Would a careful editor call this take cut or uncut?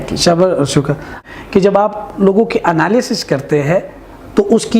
cut